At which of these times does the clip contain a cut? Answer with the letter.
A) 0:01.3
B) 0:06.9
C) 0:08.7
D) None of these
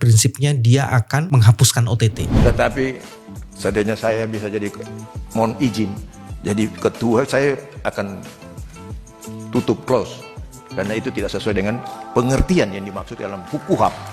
A